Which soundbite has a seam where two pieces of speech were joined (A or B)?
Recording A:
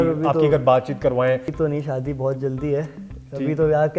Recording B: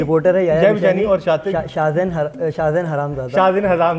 A